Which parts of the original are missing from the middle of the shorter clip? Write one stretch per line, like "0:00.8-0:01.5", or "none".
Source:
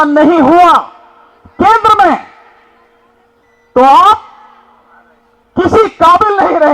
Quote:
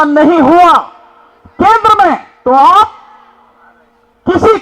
0:02.3-0:03.6